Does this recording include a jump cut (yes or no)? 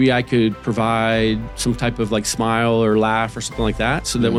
no